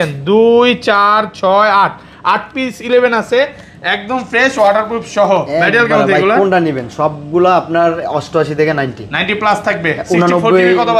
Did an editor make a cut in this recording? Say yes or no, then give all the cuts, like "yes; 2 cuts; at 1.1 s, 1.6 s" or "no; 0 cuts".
no; 0 cuts